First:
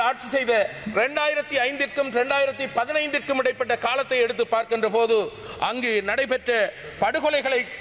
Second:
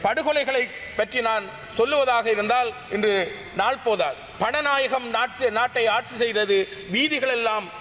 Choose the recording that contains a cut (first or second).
second